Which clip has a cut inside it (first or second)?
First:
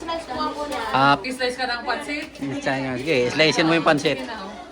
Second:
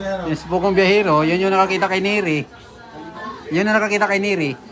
first